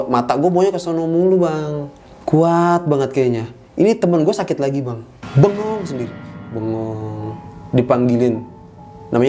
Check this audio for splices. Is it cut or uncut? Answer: uncut